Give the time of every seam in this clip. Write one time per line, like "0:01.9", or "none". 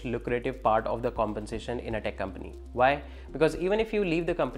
none

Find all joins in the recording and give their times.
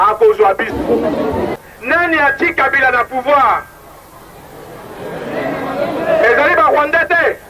0:01.7

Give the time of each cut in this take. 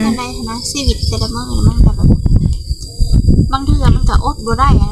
none

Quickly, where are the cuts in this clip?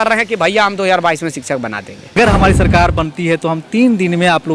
0:02.2

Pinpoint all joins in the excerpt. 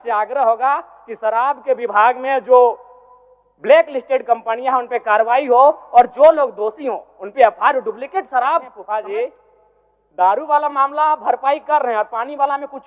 0:08.8

